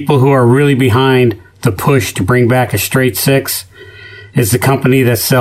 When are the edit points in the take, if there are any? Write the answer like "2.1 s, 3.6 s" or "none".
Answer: none